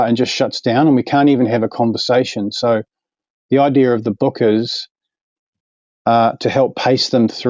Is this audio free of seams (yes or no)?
yes